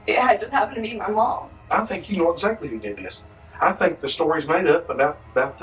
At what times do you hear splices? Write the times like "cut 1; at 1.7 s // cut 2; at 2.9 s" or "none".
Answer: cut 1; at 1.5 s